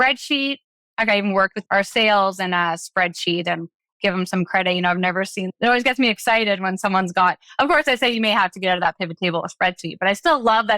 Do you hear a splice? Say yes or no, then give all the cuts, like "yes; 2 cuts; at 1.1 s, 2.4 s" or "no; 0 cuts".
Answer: yes; 2 cuts; at 1.6 s, 5.5 s